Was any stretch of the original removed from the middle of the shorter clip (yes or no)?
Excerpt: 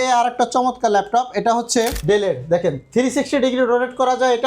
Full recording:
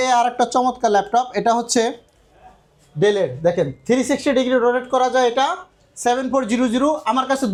yes